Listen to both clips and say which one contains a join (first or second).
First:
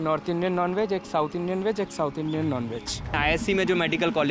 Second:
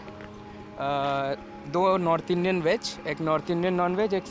first